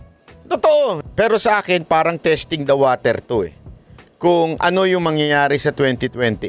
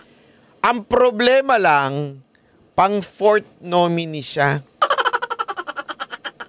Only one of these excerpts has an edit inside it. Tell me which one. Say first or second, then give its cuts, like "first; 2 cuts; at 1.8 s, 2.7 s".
first; 1 cut; at 1.0 s